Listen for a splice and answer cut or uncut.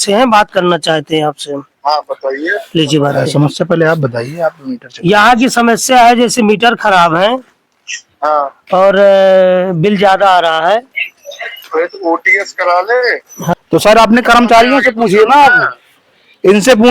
cut